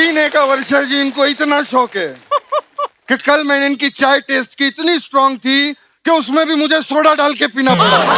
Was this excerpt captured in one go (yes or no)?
yes